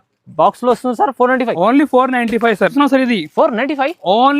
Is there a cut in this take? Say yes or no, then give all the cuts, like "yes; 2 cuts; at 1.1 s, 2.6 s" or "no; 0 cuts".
yes; 1 cut; at 2.7 s